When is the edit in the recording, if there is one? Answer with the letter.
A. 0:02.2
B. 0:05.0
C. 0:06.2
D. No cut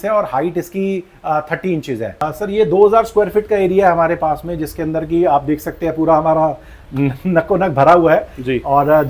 A